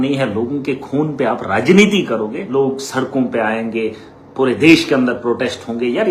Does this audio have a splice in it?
yes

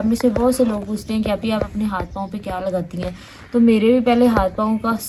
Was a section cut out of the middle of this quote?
no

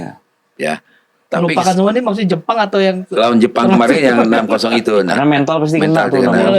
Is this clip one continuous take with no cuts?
yes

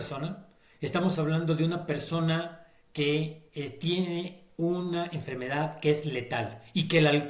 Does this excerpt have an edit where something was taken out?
no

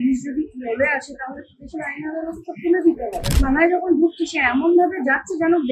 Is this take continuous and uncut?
no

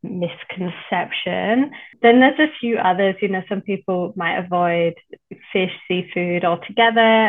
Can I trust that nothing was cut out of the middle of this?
no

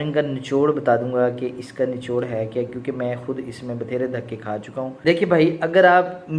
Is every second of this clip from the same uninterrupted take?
no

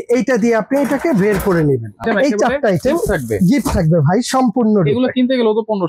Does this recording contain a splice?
yes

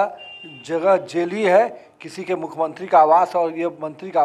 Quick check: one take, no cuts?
yes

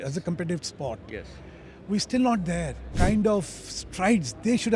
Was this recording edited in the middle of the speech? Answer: yes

